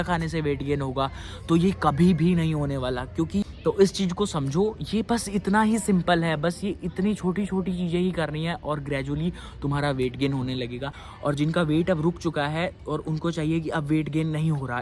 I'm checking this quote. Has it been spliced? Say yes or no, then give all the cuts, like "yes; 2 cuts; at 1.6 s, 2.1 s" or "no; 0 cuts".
yes; 2 cuts; at 3.5 s, 11.0 s